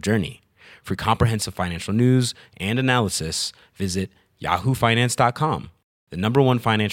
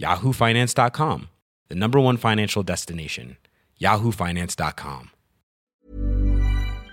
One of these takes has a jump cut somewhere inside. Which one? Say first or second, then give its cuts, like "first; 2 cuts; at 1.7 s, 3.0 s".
second; 1 cut; at 5.7 s